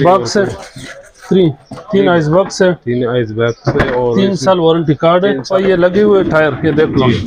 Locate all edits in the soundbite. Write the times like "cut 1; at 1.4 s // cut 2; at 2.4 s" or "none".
cut 1; at 5.4 s